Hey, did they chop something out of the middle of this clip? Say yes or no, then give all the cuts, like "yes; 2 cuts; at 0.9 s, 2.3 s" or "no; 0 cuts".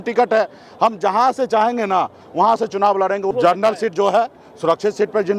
yes; 1 cut; at 3.3 s